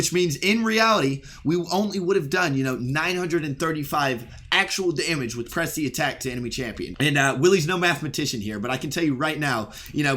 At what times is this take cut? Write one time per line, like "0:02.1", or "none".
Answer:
0:06.9